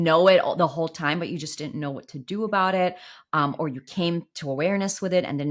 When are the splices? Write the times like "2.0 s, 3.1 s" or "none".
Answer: none